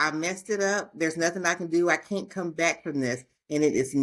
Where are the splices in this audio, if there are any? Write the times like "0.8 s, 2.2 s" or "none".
none